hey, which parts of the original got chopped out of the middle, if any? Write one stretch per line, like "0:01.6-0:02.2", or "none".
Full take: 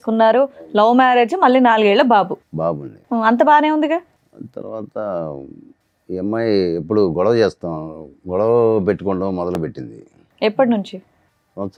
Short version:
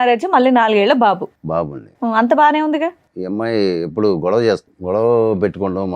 0:04.2-0:06.0
0:07.7-0:08.2